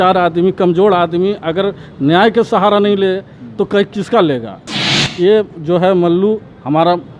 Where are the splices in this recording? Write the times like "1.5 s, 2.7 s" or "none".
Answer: 5.0 s

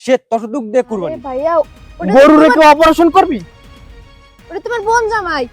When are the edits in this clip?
1.2 s

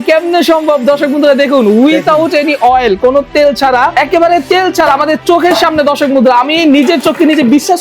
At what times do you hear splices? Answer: 3.9 s

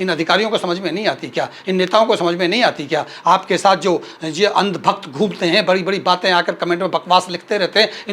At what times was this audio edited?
none

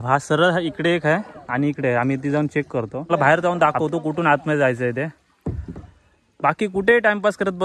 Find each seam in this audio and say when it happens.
3.1 s

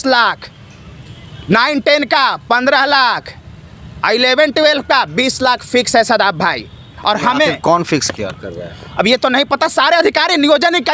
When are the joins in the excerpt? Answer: none

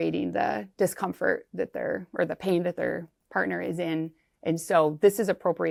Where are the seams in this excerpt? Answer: none

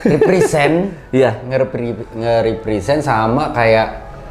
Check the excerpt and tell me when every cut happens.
none

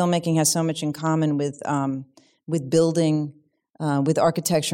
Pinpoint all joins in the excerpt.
none

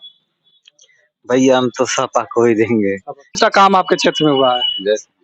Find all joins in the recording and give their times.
3.4 s

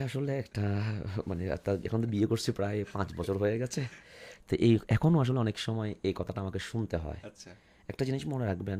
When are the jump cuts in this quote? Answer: none

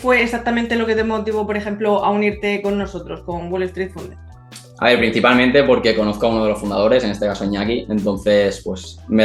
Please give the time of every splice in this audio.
none

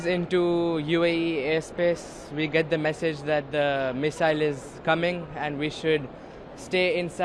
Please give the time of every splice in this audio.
none

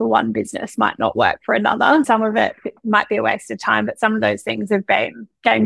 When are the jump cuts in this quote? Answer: 2.1 s

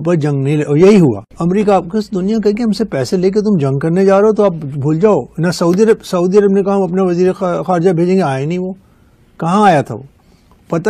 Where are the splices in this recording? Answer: none

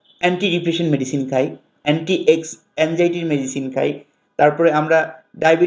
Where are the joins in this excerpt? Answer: none

